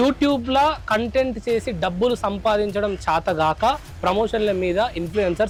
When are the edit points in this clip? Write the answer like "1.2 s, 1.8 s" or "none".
none